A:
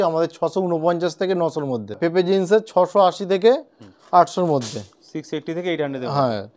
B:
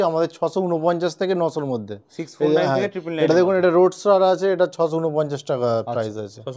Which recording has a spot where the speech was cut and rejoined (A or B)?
A